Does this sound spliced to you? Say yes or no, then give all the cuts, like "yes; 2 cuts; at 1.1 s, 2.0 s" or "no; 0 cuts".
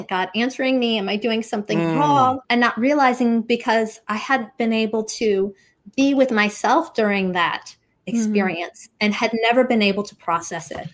yes; 1 cut; at 2.4 s